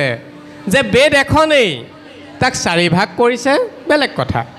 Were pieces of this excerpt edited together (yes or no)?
no